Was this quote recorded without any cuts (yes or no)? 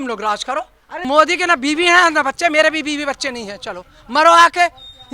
no